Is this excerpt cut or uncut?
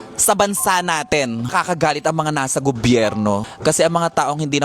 cut